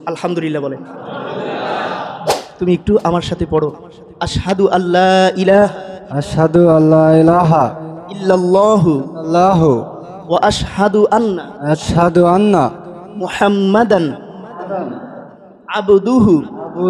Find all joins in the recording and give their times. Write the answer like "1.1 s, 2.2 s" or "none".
2.2 s